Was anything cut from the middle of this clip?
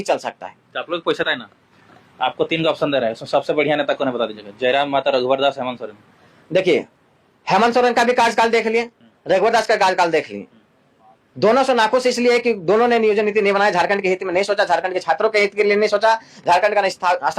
yes; 1 cut; at 1.3 s

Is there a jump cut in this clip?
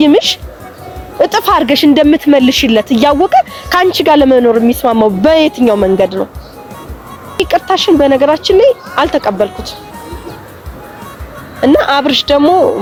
no; 0 cuts

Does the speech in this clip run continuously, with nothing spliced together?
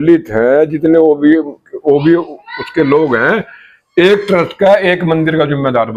yes; 0 cuts

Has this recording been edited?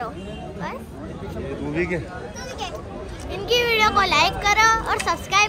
no; 0 cuts

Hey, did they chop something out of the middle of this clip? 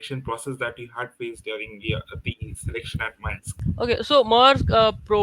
yes; 1 cut; at 3.6 s

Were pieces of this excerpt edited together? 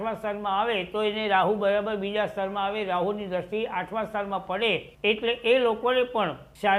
no; 0 cuts

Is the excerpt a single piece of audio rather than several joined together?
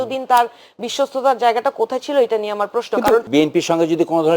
no; 1 cut; at 3.3 s

